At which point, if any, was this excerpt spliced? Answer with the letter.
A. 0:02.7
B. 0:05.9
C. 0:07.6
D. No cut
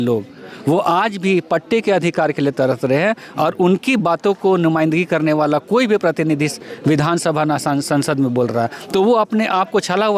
D